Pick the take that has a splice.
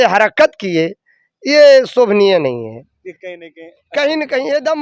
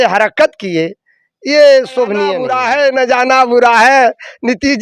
second; 1 cut; at 2.5 s

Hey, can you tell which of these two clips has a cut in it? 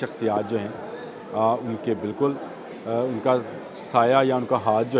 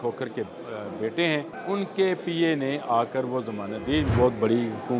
second; 2 cuts; at 1.5 s, 4.1 s

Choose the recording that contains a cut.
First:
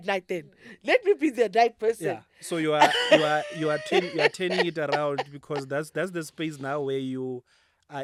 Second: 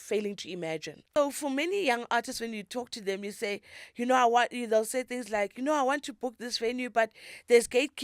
second; 1 cut; at 1.2 s

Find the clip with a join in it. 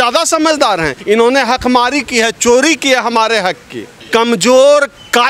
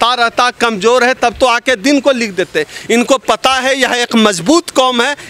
first; 2 cuts; at 1.0 s, 4.0 s

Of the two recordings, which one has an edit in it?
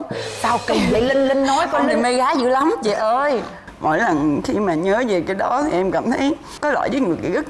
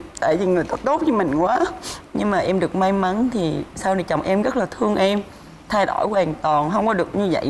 first; 1 cut; at 3.6 s

